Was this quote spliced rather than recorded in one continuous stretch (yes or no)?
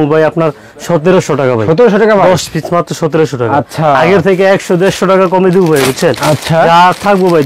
no